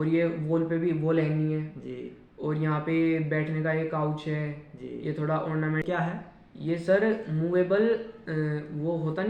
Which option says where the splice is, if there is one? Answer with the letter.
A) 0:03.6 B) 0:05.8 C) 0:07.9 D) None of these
B